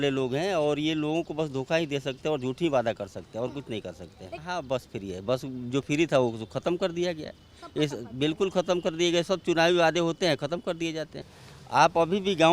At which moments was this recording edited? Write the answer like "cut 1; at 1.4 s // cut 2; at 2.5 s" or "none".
cut 1; at 4.4 s // cut 2; at 11.3 s